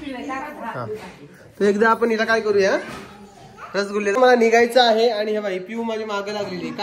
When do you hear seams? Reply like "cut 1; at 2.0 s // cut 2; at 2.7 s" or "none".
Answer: cut 1; at 4.1 s